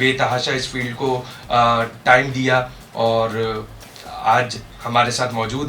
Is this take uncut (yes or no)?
yes